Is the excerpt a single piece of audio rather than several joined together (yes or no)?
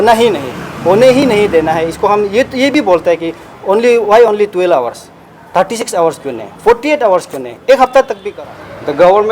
no